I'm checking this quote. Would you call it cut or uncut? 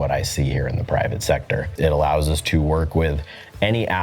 cut